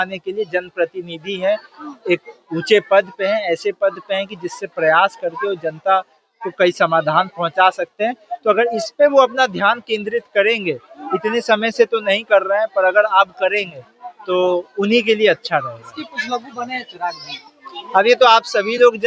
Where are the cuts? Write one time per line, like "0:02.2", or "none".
none